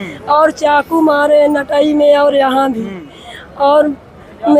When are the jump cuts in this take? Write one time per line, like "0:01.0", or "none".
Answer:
none